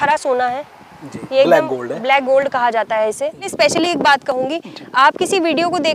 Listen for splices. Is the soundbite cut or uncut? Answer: cut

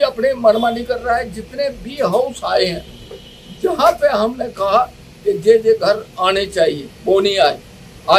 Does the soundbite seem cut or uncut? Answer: uncut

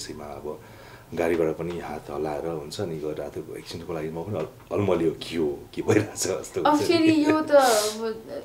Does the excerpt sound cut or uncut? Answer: uncut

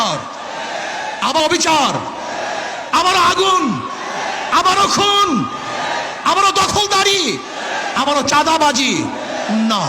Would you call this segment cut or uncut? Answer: cut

